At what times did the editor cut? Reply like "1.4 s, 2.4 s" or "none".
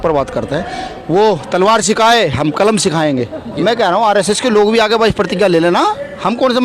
3.5 s